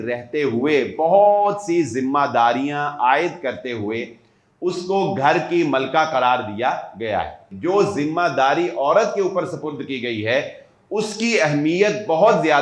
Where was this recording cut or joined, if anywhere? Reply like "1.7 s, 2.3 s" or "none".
7.5 s